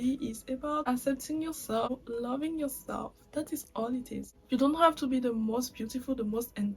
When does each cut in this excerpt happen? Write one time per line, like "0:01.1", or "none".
0:00.8
0:01.9
0:04.3